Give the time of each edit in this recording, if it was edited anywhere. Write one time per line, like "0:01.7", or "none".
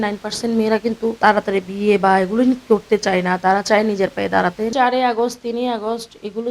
0:01.2
0:04.7